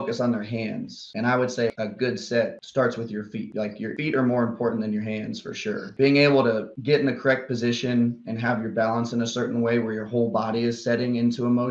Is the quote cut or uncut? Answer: cut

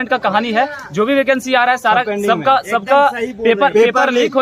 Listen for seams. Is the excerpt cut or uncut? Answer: uncut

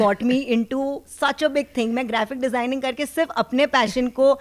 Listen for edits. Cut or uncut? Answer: uncut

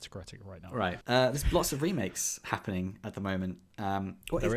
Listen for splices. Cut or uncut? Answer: cut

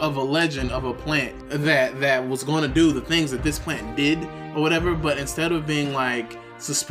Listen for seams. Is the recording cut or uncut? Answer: cut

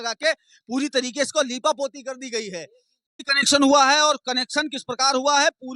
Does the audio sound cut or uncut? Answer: cut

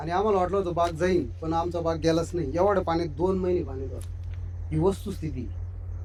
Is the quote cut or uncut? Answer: uncut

